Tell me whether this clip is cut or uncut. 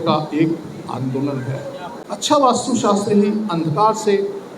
cut